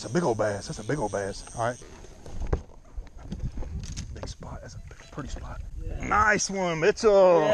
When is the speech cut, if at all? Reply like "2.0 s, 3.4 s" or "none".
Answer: 1.8 s, 5.7 s